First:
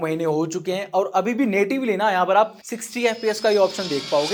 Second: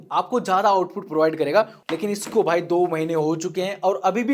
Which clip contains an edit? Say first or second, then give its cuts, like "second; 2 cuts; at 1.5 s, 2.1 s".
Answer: second; 1 cut; at 1.8 s